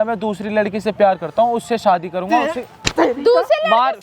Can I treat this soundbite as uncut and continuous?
yes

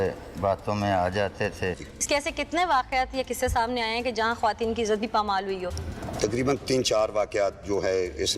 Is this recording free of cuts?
no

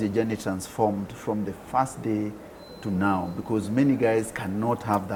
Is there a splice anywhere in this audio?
no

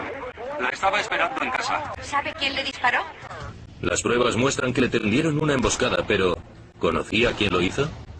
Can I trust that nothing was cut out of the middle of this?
yes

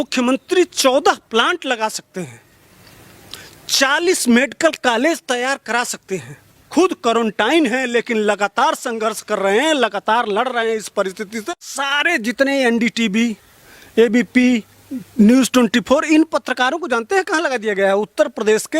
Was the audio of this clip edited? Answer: yes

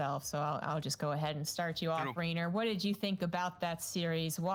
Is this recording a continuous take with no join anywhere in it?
yes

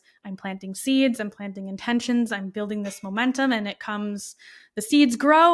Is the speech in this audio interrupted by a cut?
no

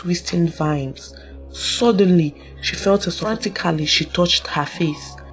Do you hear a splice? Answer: yes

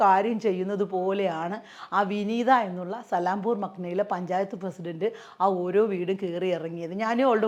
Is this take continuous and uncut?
yes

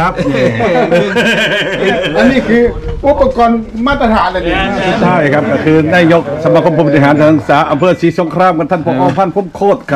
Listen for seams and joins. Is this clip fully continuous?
no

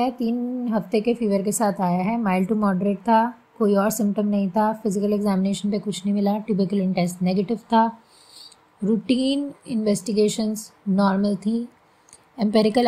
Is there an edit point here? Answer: no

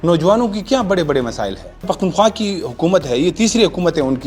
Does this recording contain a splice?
yes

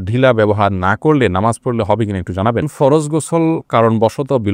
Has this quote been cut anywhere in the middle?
yes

